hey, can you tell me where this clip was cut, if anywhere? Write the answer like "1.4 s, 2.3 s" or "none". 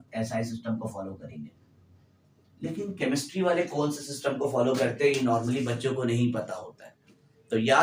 none